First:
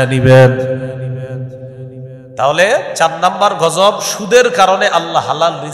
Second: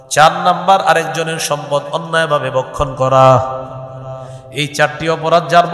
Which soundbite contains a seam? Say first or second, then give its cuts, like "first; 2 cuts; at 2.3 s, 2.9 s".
first; 1 cut; at 2.3 s